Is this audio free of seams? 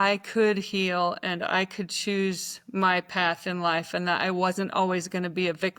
yes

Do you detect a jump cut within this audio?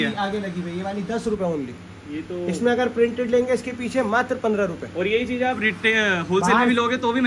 no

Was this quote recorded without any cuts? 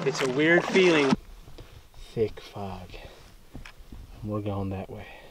no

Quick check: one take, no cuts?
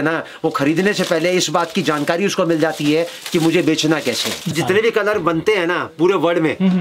no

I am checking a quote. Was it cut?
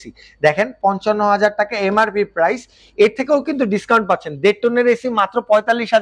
no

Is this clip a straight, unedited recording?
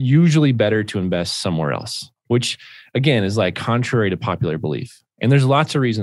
yes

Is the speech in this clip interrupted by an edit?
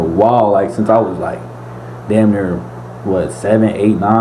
no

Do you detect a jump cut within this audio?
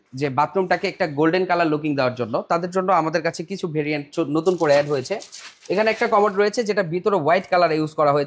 no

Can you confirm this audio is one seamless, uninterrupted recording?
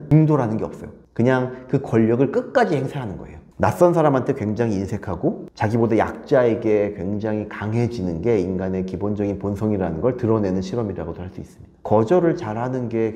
no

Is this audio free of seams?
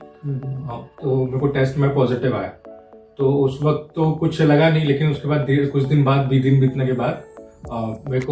yes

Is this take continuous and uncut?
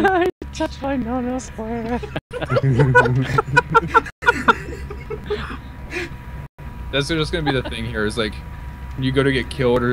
no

